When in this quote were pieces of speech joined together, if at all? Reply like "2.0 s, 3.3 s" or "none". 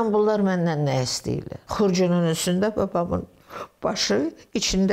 1.6 s